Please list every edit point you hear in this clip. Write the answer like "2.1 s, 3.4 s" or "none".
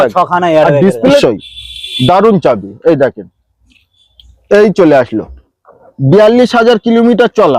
1.2 s